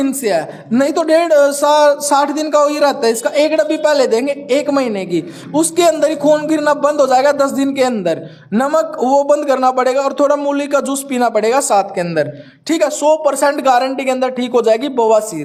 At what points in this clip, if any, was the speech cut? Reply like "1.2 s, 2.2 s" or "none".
none